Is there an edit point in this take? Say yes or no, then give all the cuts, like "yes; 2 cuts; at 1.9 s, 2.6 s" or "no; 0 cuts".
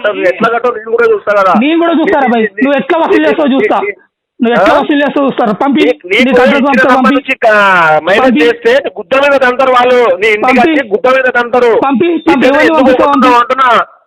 no; 0 cuts